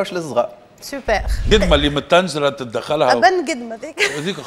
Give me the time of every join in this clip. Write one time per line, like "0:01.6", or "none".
0:01.5